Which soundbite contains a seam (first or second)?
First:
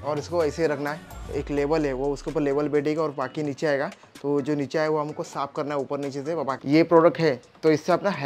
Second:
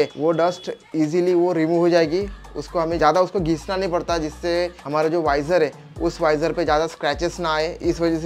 first